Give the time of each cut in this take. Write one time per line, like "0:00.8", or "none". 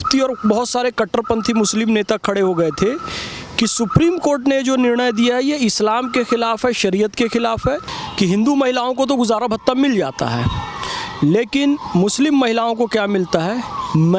0:08.0